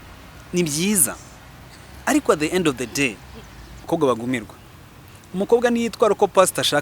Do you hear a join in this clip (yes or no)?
yes